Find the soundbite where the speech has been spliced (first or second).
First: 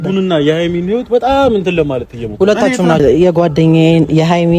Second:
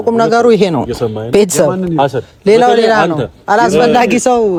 first